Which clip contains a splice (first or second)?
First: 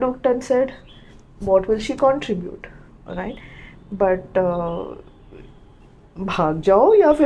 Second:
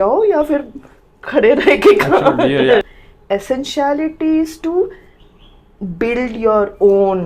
second